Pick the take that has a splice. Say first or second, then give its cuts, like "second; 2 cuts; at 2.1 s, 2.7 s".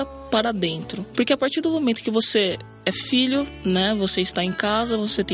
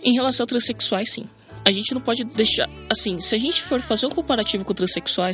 first; 1 cut; at 1.0 s